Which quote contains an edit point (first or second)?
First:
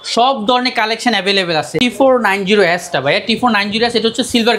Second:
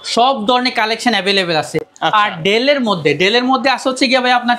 first